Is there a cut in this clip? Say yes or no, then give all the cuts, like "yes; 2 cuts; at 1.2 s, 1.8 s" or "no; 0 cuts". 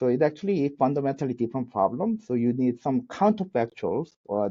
no; 0 cuts